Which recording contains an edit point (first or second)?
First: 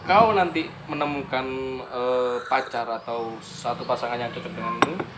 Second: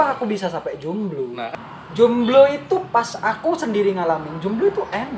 second